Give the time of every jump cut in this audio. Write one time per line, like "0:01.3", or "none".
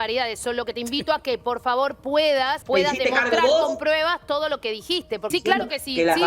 0:02.6
0:05.2